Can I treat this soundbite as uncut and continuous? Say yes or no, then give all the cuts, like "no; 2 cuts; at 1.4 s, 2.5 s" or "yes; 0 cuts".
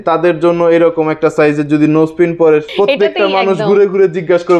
no; 1 cut; at 2.7 s